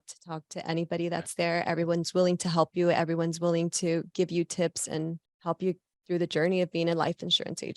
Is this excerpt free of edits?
no; 1 cut; at 5.3 s

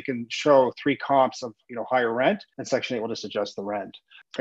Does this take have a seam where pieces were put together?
yes; 1 cut; at 2.5 s

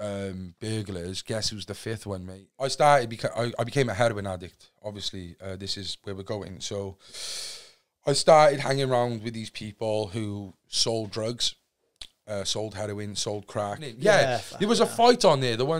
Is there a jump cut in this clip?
yes; 2 cuts; at 2.4 s, 13.9 s

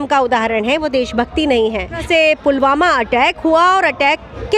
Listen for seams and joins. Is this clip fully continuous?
no; 1 cut; at 2.0 s

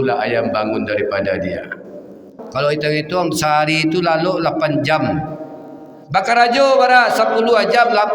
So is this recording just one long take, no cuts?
no; 1 cut; at 2.4 s

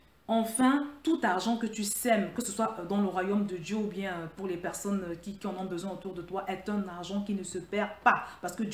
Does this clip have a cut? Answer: no; 0 cuts

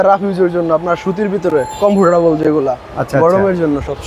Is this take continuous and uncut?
yes; 0 cuts

